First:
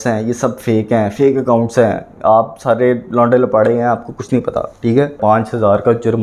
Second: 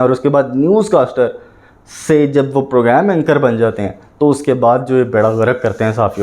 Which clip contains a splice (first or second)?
first